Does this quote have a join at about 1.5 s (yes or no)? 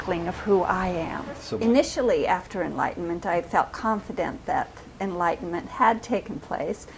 yes